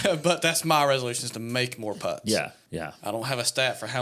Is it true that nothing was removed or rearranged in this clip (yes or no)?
no